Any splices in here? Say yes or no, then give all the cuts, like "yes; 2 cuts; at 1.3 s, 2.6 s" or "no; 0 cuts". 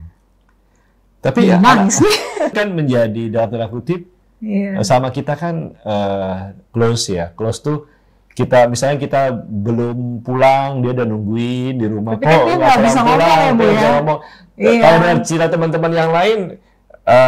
yes; 1 cut; at 2.6 s